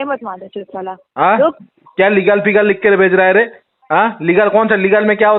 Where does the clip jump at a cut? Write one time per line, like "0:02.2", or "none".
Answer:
none